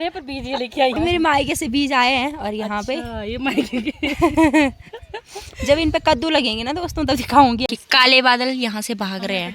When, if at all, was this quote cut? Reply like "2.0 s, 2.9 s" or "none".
0.9 s, 7.6 s